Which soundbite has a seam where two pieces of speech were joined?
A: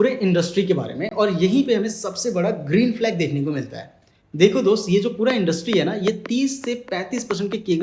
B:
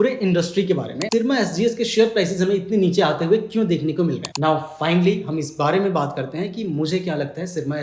B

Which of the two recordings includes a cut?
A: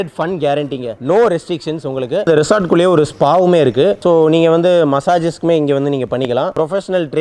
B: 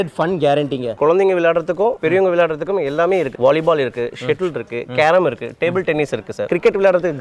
B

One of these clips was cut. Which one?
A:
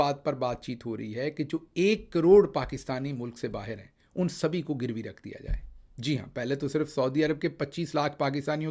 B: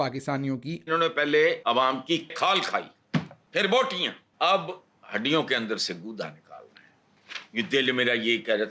B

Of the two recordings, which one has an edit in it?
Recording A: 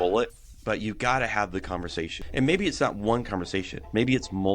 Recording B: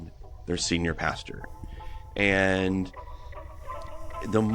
A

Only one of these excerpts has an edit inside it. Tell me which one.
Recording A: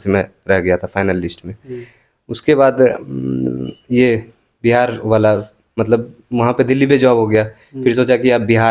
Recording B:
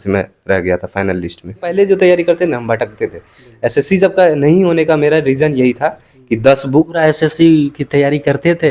B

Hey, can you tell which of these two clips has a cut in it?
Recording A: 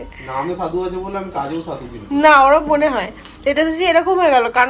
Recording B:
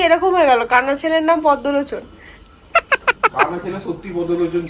B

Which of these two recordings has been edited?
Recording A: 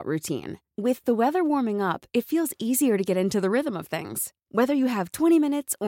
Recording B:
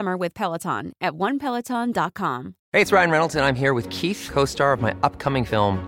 B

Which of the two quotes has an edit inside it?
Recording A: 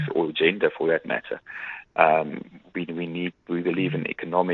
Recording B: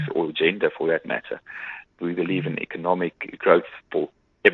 B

